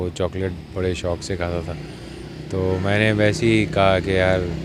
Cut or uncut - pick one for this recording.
uncut